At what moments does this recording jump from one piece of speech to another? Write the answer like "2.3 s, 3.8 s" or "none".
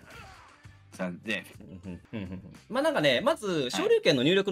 2.0 s